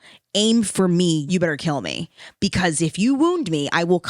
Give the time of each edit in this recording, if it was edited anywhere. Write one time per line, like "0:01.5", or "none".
0:01.3